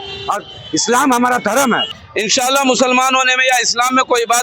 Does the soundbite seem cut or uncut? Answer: cut